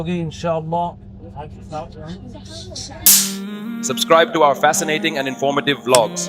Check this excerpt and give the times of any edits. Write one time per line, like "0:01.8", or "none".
0:03.0

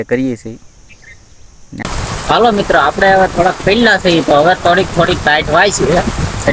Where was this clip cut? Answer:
0:01.8

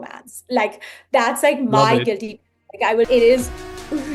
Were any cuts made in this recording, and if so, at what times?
0:03.1

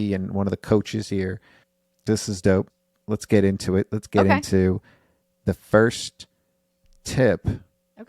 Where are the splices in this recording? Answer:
none

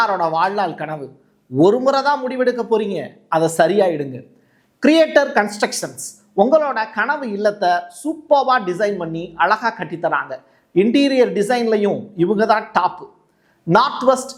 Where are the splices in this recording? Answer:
none

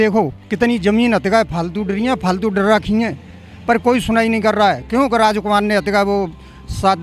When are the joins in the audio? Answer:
none

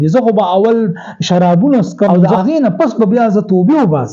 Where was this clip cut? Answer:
0:02.2

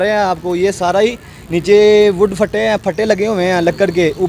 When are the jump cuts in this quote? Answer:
none

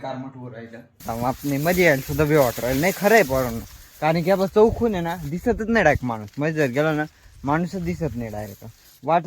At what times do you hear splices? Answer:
0:01.1

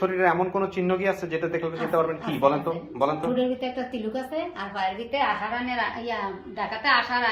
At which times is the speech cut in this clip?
none

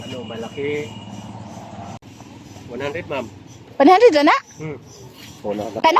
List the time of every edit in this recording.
0:02.0

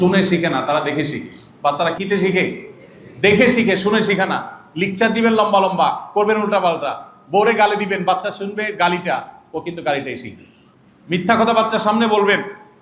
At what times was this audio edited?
0:02.0

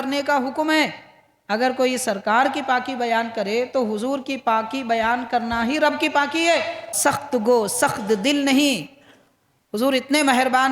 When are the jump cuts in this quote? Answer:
0:07.0

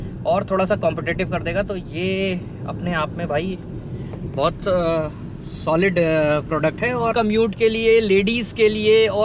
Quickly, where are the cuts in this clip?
0:07.1

